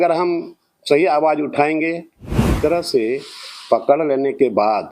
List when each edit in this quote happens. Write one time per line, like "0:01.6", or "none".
0:02.5